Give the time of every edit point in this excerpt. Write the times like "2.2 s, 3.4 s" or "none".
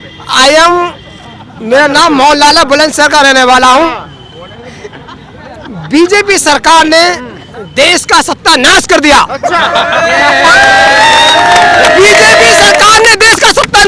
none